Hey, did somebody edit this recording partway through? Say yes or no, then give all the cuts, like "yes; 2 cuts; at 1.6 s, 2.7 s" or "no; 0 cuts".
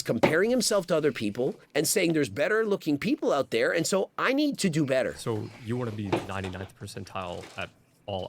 yes; 1 cut; at 5.2 s